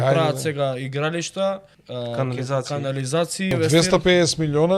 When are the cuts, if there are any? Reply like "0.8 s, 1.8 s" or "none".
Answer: 1.8 s, 3.5 s